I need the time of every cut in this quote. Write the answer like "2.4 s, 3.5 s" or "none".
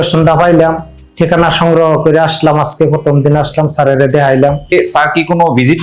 4.7 s